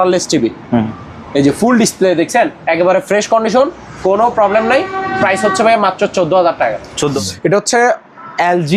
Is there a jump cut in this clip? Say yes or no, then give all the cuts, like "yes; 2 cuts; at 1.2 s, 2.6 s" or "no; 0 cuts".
yes; 1 cut; at 7.1 s